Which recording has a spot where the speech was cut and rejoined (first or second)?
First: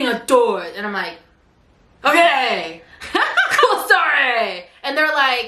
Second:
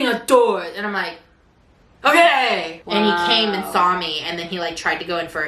second